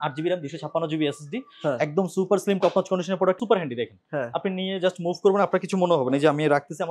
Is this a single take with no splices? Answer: no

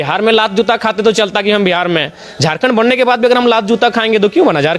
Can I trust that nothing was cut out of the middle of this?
yes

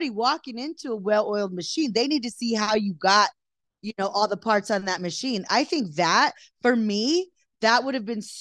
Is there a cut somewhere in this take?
no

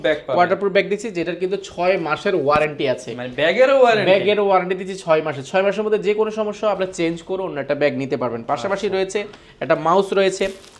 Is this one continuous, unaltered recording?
yes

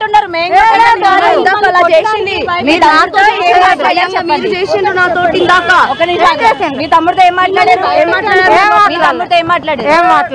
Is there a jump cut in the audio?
yes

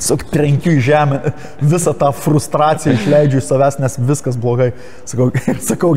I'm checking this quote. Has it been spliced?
no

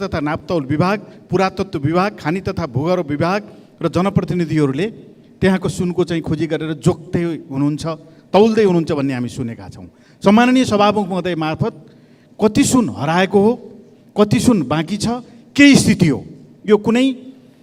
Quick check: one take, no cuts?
yes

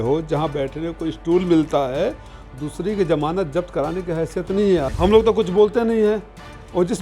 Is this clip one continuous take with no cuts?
no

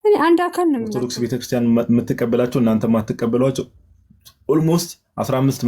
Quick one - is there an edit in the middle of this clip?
yes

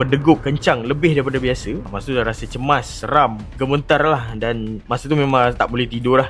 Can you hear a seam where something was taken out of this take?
no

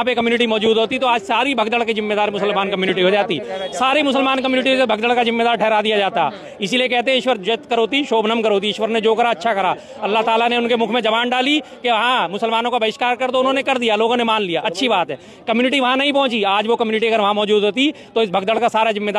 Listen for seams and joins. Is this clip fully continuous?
yes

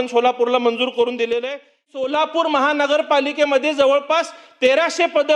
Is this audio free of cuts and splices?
no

